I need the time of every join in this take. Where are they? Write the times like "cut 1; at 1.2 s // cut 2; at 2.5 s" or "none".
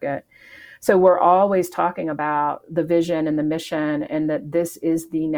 none